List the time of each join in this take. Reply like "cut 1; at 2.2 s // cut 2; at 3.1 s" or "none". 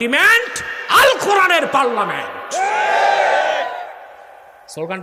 none